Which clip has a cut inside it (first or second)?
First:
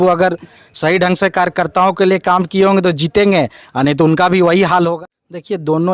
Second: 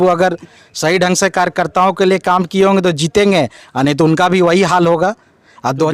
first